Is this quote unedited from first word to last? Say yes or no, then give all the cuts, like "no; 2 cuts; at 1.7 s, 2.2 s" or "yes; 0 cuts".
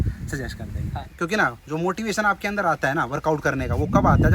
no; 1 cut; at 1.0 s